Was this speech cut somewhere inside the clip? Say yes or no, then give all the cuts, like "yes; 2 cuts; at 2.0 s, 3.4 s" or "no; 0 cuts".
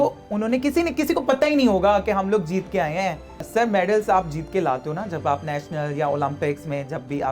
yes; 1 cut; at 3.4 s